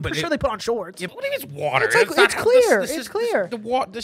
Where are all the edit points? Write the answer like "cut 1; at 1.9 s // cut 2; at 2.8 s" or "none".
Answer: cut 1; at 1.0 s